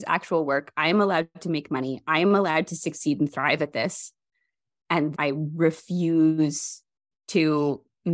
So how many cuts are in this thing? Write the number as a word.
one